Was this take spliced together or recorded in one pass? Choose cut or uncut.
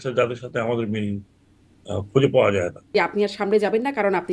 cut